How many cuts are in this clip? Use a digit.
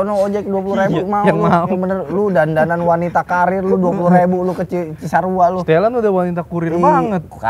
0